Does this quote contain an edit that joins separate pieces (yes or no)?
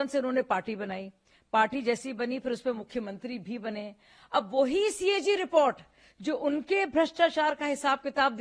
no